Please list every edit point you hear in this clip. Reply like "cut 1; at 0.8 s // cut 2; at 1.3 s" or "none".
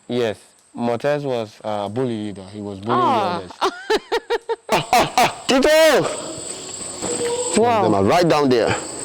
cut 1; at 4.7 s // cut 2; at 5.4 s // cut 3; at 6.9 s